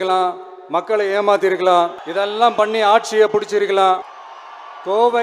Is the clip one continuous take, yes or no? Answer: no